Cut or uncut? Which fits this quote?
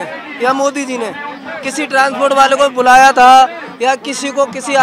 uncut